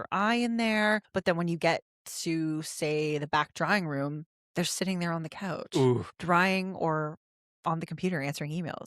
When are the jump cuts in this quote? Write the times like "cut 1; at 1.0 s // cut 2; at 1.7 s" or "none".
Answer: cut 1; at 1.1 s // cut 2; at 6.1 s